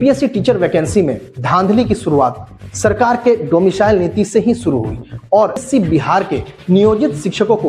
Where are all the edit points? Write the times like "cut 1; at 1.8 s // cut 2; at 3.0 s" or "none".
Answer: cut 1; at 5.6 s